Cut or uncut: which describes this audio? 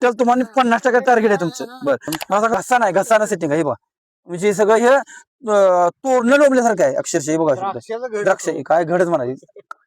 cut